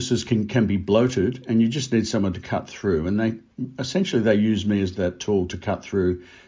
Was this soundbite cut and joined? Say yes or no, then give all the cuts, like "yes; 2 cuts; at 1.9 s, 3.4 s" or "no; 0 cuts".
no; 0 cuts